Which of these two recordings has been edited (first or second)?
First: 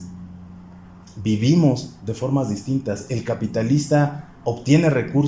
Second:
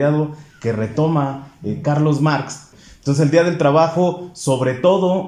second